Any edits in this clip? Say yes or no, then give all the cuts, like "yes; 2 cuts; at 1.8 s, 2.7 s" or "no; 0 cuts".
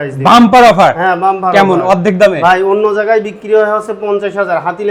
no; 0 cuts